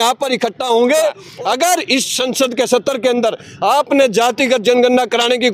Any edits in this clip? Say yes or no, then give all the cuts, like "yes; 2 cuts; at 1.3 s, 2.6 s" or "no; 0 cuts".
yes; 1 cut; at 1.2 s